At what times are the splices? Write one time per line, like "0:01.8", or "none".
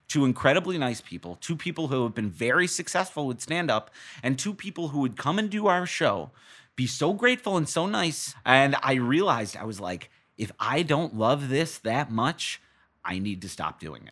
0:08.3